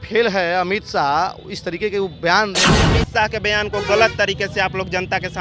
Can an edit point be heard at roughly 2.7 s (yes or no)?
yes